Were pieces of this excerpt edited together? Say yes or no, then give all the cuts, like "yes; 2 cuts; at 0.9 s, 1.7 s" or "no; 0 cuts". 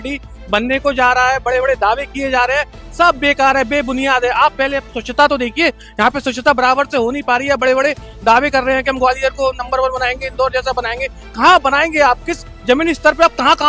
no; 0 cuts